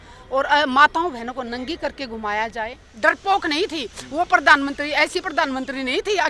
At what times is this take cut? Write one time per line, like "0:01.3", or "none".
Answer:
0:02.8